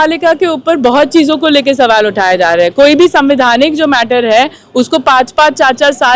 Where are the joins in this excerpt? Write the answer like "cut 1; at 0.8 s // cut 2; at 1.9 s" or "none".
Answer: none